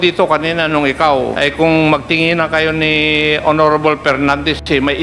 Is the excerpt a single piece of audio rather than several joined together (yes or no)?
no